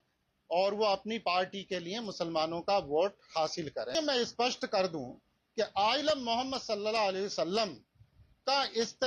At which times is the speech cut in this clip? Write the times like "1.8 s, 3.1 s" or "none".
3.9 s